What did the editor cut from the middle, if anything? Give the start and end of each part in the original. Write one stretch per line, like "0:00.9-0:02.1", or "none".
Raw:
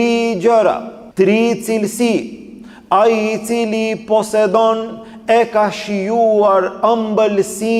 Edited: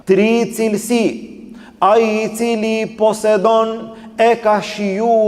none